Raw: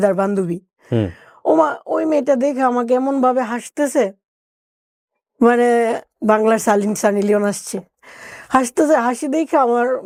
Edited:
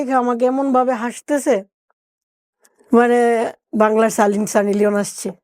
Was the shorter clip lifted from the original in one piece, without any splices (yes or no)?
yes